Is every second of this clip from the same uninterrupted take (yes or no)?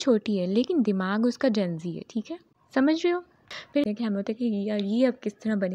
no